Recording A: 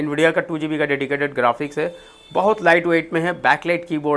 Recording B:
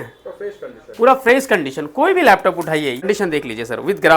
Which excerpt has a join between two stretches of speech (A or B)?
B